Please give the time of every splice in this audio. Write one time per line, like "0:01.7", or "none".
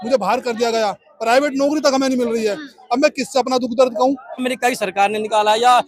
0:04.5